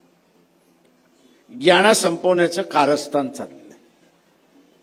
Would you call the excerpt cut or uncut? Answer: uncut